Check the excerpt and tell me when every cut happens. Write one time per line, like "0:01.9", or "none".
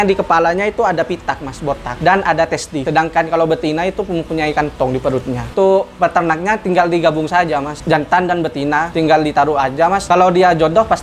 0:01.9
0:02.8
0:05.5
0:07.8
0:08.9
0:10.0